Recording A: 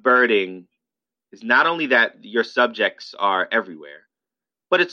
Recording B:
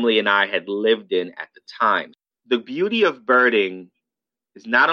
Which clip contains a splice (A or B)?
B